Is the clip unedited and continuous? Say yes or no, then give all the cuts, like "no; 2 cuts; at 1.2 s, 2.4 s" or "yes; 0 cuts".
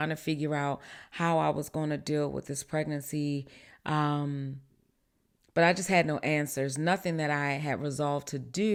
yes; 0 cuts